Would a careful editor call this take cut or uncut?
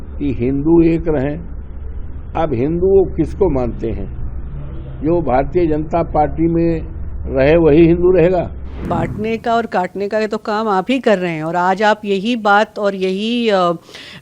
cut